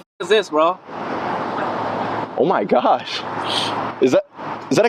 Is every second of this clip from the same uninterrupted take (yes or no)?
yes